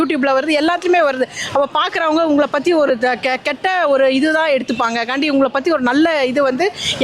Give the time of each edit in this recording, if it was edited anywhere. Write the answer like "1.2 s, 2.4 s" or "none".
none